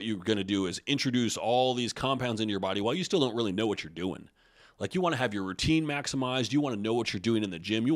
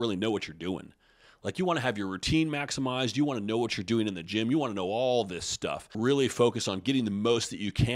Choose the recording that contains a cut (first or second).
second